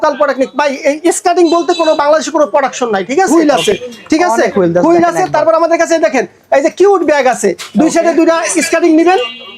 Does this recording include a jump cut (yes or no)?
yes